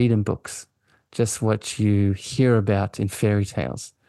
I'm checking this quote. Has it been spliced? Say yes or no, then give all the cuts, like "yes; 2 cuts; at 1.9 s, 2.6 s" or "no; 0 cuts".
no; 0 cuts